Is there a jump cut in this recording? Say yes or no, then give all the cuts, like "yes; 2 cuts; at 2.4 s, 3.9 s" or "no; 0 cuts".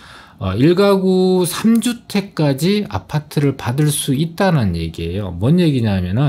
no; 0 cuts